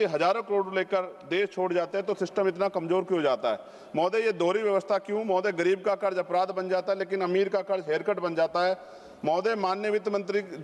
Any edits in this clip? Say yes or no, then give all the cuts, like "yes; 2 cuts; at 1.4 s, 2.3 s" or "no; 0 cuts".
no; 0 cuts